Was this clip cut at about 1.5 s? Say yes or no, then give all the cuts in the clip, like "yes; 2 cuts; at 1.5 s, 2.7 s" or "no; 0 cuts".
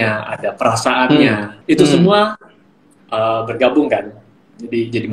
yes; 1 cut; at 1.5 s